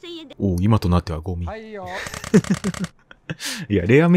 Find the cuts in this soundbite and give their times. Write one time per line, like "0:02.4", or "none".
none